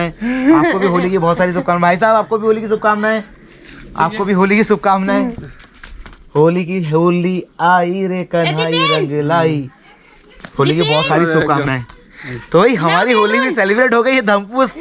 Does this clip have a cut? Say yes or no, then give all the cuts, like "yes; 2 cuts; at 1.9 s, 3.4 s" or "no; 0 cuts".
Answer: no; 0 cuts